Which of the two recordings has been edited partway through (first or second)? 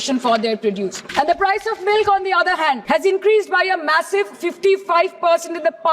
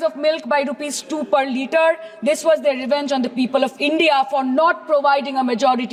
first